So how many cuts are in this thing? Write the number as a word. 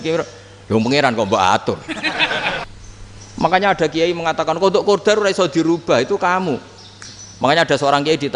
one